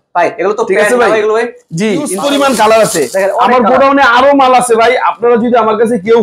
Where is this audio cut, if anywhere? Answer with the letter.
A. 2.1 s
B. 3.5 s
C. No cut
A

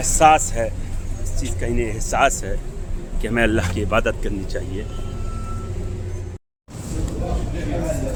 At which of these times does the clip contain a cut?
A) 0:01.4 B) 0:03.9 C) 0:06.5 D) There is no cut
D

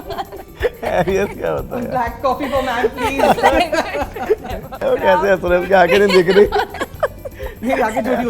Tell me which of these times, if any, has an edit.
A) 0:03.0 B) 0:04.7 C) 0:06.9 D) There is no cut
B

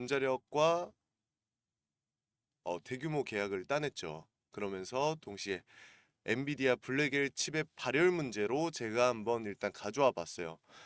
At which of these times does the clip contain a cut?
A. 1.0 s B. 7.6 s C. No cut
C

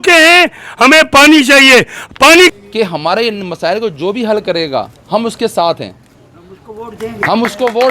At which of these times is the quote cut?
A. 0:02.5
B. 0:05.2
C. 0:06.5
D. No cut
A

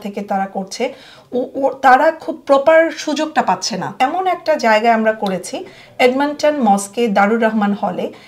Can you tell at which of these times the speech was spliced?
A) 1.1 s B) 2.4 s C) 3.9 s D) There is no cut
C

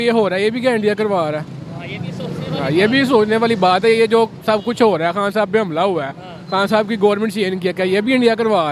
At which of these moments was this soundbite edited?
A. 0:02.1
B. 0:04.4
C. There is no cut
C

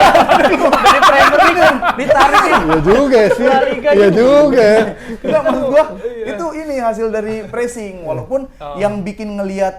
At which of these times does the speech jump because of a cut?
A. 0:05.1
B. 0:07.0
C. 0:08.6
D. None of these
D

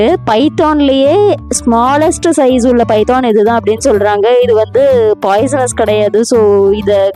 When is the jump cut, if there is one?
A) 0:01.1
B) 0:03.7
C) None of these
C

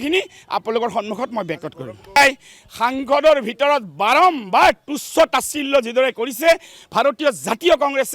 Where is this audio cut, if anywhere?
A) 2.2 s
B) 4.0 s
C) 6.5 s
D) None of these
A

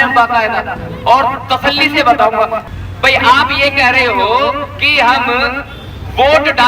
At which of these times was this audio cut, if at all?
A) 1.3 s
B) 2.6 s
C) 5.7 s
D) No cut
B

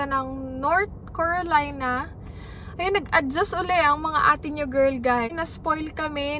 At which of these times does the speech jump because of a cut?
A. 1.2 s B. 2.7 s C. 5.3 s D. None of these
C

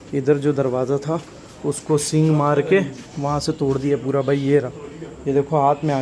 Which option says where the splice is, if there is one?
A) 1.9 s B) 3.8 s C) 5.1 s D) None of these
D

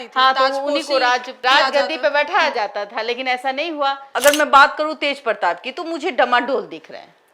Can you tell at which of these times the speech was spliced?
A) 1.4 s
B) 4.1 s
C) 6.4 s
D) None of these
B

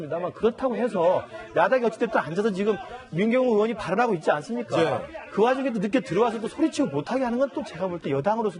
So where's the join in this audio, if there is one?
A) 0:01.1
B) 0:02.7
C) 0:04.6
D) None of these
A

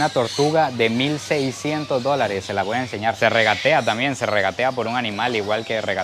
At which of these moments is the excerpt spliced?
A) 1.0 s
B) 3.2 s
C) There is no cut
B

